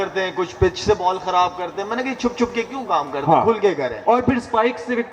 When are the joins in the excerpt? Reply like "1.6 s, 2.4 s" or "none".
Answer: none